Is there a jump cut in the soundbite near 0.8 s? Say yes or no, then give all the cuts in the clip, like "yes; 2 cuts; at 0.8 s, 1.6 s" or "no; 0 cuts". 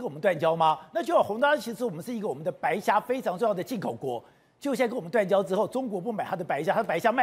no; 0 cuts